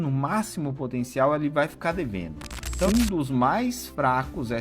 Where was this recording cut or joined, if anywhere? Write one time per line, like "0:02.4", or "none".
0:02.9